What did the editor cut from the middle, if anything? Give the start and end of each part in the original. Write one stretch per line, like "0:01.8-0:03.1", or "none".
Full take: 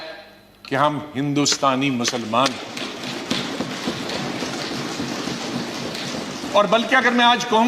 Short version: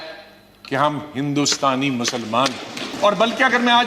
0:02.8-0:06.4

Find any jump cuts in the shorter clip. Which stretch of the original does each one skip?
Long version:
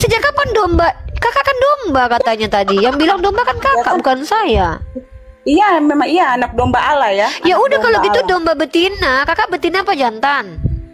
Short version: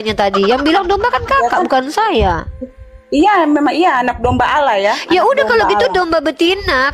none

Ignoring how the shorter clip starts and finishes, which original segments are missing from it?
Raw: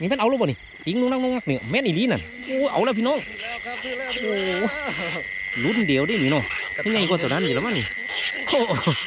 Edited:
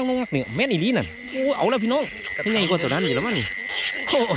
0:03.4-0:06.6

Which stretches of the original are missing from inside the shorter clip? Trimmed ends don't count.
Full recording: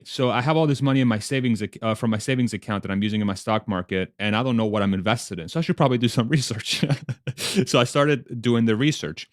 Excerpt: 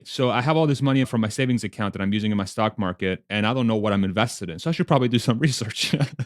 0:01.0-0:01.9

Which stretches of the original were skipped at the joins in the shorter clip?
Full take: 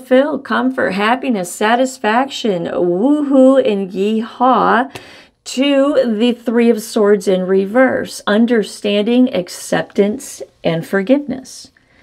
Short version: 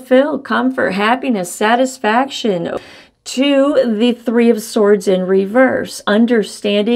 0:02.7-0:04.9

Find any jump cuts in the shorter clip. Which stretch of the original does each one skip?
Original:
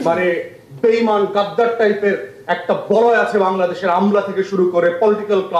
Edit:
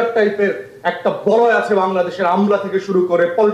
none

